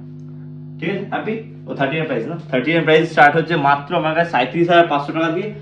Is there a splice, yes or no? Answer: no